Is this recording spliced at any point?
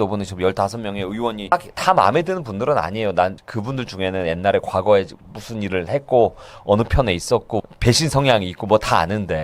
no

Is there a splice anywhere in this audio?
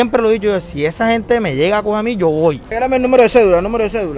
yes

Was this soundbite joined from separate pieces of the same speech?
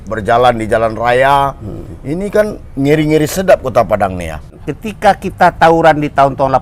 yes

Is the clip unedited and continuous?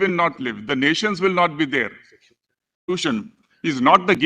no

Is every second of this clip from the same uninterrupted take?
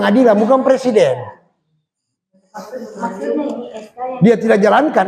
yes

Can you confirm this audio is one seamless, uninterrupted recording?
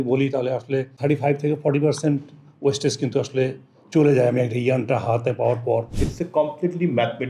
no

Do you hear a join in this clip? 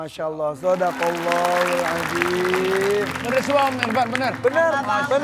no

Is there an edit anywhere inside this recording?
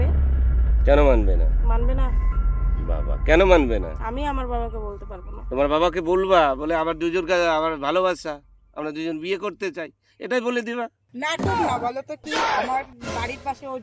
yes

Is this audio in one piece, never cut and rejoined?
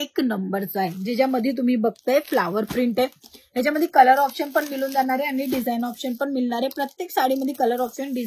yes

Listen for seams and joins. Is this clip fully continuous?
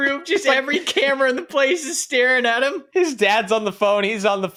yes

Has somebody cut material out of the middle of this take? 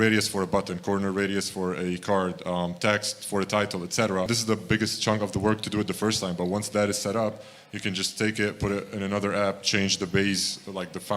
yes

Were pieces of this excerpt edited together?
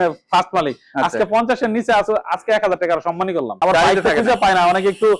yes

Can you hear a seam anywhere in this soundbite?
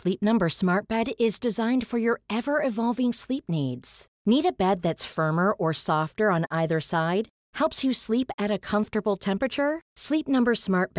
no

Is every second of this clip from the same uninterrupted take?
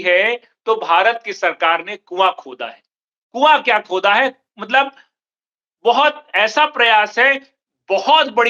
yes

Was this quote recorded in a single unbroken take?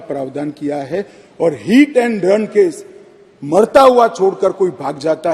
yes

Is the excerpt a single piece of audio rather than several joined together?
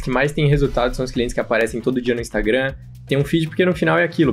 yes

